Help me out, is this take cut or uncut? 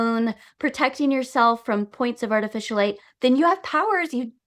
uncut